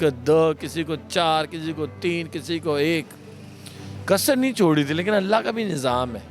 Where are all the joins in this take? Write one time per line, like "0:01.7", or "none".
none